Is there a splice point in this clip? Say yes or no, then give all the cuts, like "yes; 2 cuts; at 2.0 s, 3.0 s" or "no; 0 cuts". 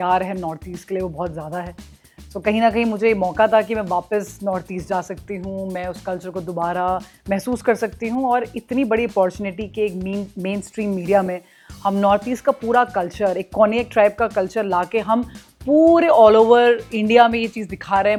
no; 0 cuts